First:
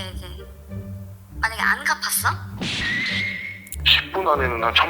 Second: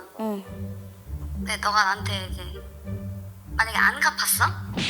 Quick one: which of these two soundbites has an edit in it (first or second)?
first